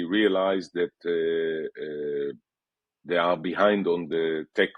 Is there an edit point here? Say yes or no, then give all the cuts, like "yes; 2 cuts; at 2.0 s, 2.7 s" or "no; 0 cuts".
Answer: no; 0 cuts